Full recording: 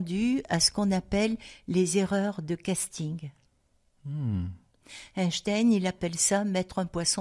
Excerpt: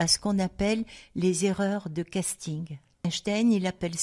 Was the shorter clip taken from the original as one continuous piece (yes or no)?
no